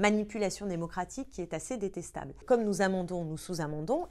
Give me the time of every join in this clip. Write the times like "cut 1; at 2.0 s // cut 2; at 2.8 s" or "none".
cut 1; at 2.4 s